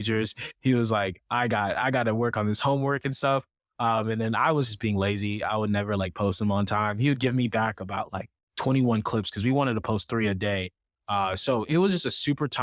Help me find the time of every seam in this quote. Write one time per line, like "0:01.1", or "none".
none